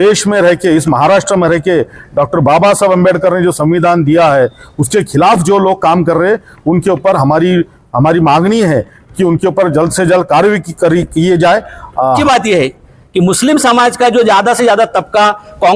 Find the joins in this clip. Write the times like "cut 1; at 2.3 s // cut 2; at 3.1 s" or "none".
cut 1; at 12.2 s